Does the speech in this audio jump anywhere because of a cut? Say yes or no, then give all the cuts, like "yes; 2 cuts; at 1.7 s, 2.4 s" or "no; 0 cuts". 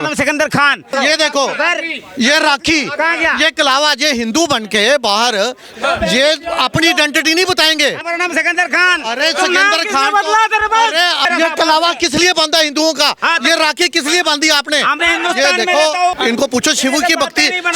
yes; 5 cuts; at 0.9 s, 5.7 s, 8.0 s, 11.2 s, 16.1 s